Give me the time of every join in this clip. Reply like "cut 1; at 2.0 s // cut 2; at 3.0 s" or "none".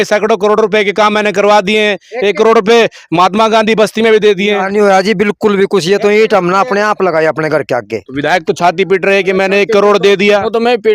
cut 1; at 8.1 s